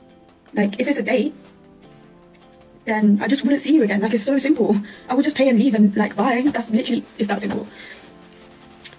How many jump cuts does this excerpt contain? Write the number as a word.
one